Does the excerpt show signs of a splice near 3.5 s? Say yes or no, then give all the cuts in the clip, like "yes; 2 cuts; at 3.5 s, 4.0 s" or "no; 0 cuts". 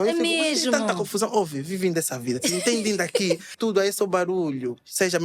yes; 1 cut; at 3.5 s